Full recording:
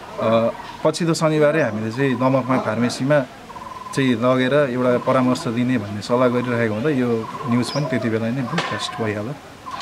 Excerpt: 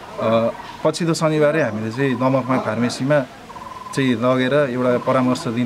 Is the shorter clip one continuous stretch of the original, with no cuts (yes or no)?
yes